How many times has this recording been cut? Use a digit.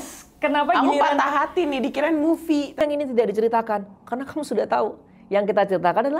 1